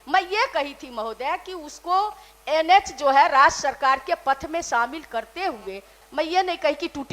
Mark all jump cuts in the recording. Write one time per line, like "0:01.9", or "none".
0:06.0